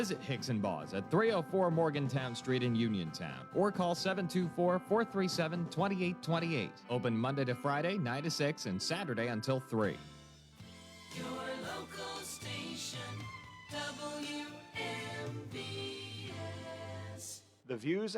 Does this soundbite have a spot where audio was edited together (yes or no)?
yes